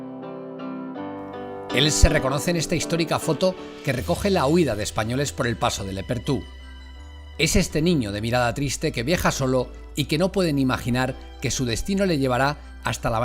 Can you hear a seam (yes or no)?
yes